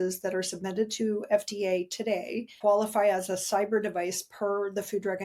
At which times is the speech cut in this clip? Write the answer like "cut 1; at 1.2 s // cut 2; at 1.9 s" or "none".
cut 1; at 2.5 s